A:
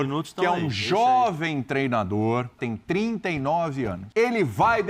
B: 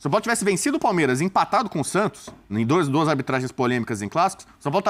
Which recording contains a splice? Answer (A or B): A